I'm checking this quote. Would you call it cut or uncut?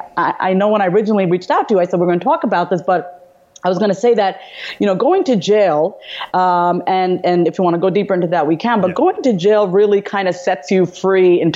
uncut